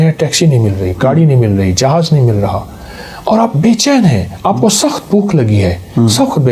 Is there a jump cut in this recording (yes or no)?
no